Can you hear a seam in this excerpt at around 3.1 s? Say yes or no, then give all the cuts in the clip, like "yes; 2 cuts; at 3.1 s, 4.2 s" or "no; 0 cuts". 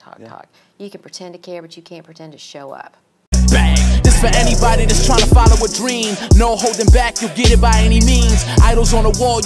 yes; 1 cut; at 3.1 s